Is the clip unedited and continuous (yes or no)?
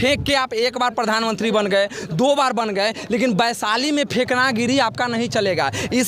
yes